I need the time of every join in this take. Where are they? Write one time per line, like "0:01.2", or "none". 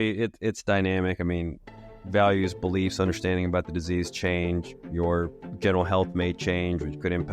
none